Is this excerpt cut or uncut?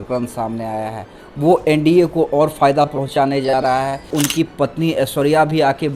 cut